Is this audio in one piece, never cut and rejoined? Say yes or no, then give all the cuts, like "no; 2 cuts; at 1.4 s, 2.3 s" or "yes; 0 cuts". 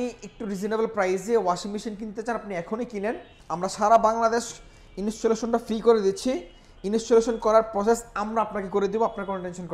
no; 1 cut; at 3.3 s